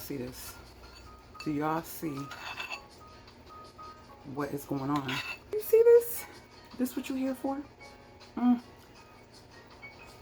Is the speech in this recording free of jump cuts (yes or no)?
no